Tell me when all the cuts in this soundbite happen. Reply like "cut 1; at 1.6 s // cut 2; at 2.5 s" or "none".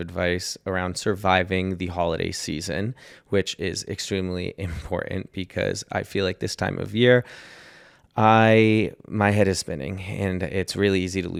none